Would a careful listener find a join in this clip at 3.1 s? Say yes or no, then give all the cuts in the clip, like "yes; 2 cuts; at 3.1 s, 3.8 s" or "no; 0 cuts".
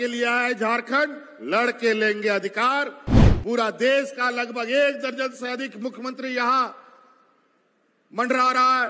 yes; 1 cut; at 3.1 s